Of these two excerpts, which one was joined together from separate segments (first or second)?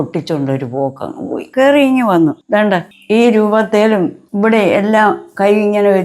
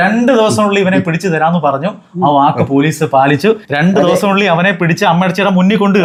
first